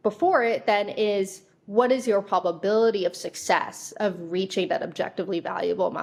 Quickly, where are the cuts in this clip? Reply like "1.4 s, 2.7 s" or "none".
none